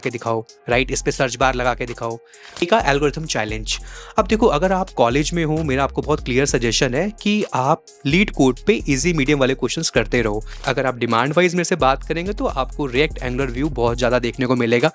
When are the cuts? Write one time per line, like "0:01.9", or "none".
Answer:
0:02.6
0:10.6